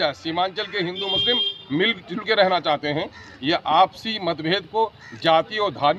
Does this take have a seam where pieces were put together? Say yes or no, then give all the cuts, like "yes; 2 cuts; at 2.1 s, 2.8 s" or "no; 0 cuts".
no; 0 cuts